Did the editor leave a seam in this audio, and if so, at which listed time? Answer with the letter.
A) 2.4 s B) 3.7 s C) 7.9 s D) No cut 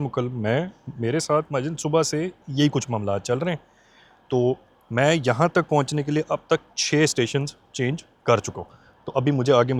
D